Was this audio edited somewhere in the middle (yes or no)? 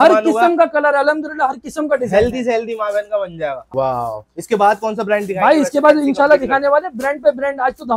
yes